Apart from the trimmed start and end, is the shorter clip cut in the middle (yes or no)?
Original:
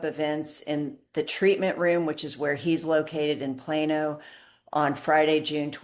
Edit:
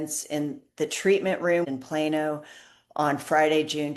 yes